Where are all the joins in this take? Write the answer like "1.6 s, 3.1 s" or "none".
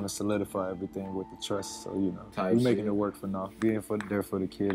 3.6 s